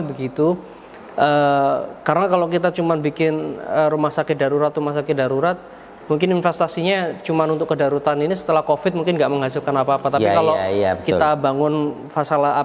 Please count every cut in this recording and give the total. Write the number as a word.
zero